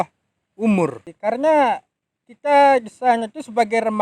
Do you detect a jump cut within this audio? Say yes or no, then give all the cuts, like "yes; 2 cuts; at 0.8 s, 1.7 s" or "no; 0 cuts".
yes; 1 cut; at 1.1 s